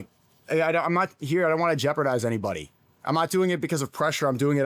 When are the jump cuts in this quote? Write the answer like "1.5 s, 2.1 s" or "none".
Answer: none